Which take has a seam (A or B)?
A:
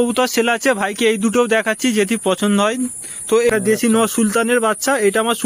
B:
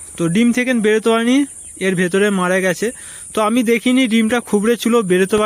A